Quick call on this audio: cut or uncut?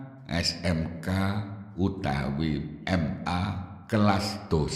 cut